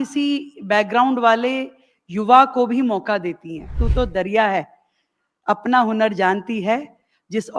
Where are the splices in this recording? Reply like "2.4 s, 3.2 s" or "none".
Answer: 3.8 s